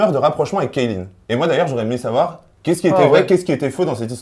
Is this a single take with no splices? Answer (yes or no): yes